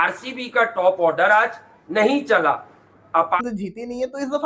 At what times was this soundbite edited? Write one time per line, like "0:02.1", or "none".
0:03.4